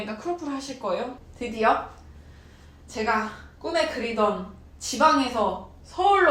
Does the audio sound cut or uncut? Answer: cut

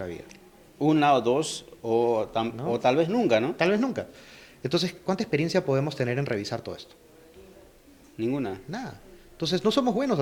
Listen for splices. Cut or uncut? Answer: uncut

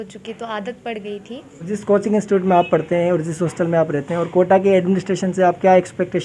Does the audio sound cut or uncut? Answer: cut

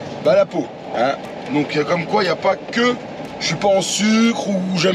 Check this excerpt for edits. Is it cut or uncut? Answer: uncut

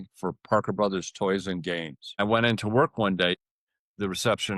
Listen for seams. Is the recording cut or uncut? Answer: cut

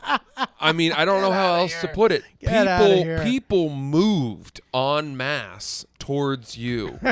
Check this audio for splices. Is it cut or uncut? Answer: uncut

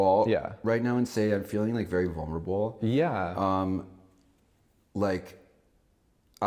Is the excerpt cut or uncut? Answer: uncut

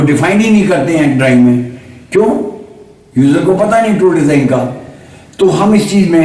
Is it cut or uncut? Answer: uncut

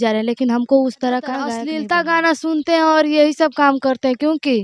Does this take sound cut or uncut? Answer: cut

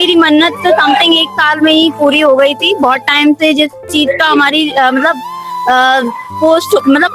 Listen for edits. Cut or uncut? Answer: uncut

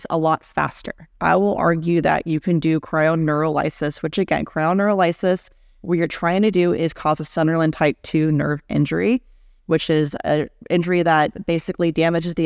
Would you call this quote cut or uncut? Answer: cut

